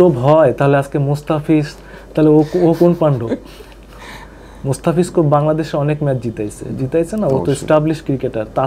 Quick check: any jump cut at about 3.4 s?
no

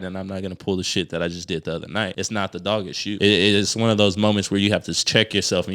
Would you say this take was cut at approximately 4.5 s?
no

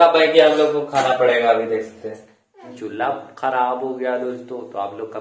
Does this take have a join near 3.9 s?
no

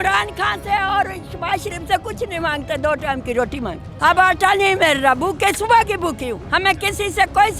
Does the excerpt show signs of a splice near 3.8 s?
yes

